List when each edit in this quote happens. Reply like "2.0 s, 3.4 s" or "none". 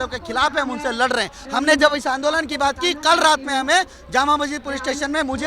1.4 s

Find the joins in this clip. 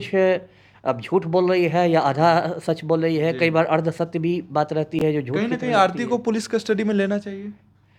none

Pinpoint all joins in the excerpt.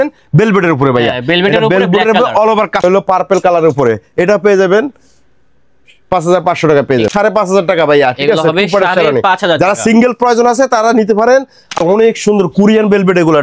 2.8 s, 7.1 s, 11.8 s

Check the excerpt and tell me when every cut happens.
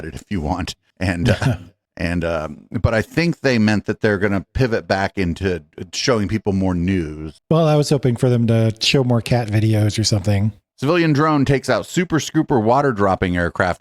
7.3 s, 10.6 s

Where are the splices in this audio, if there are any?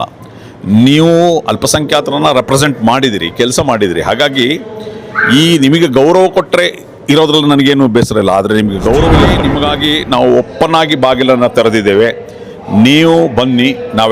9.4 s

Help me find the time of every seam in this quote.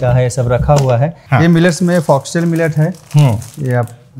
1.2 s

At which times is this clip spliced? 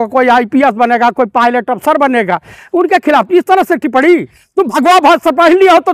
none

